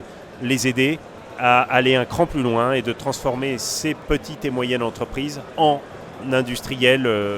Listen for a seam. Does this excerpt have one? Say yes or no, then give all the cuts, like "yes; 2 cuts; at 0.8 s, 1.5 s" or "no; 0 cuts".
yes; 2 cuts; at 4.0 s, 5.4 s